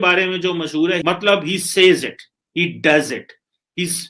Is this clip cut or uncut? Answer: cut